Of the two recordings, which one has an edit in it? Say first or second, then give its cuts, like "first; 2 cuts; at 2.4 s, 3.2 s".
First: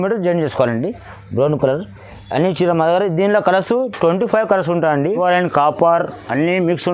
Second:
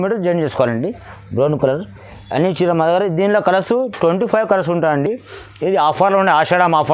first; 1 cut; at 5.2 s